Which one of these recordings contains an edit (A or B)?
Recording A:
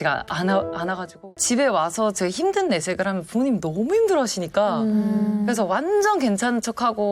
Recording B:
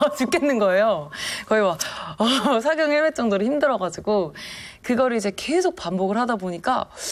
A